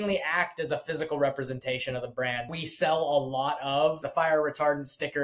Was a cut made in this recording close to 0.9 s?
no; 2 cuts; at 2.5 s, 4.0 s

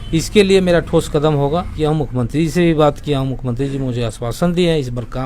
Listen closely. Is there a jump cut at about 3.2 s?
no; 1 cut; at 1.7 s

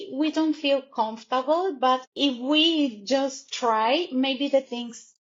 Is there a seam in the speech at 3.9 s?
no; 1 cut; at 2.1 s

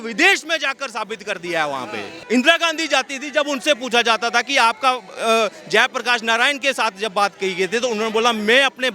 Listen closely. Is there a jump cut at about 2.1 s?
yes; 1 cut; at 2.1 s

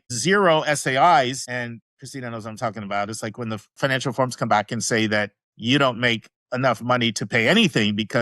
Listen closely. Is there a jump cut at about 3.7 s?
yes; 1 cut; at 3.7 s

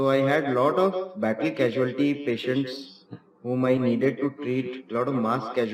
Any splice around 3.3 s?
no; 0 cuts

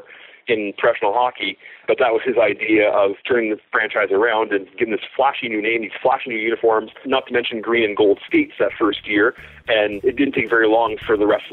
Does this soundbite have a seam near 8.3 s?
no; 4 cuts; at 1.8 s, 3.2 s, 7.0 s, 9.9 s

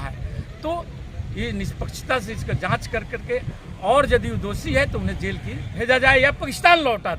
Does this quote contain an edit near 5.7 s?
yes; 1 cut; at 5.7 s

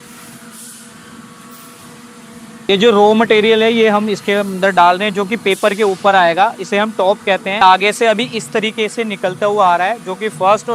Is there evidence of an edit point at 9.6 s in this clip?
no; 2 cuts; at 2.7 s, 7.6 s

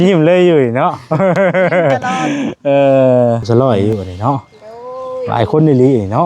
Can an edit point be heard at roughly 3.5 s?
yes; 1 cut; at 3.5 s

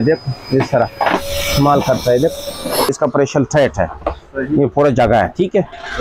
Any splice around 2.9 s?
yes; 1 cut; at 2.9 s

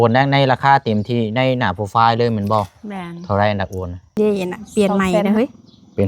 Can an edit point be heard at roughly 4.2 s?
yes; 1 cut; at 4.2 s

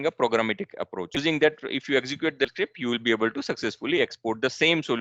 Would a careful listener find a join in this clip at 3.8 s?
no; 2 cuts; at 1.2 s, 2.5 s

